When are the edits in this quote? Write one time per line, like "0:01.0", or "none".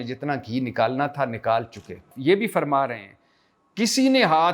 0:02.1